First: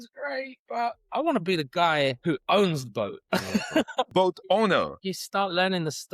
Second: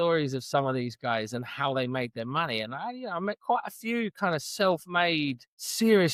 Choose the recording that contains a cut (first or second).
first